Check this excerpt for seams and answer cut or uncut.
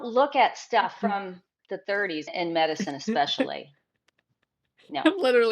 cut